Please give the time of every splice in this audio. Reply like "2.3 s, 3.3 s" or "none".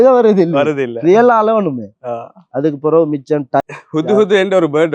3.6 s